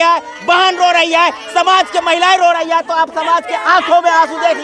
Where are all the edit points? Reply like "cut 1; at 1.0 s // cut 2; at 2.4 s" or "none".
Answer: none